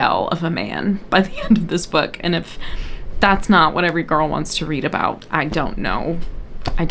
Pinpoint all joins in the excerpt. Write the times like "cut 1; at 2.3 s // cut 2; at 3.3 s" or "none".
none